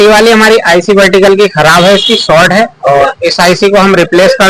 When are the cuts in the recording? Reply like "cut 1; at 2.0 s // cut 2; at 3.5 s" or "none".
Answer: none